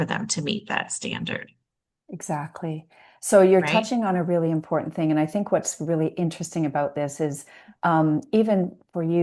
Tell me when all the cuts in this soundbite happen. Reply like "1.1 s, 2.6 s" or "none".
none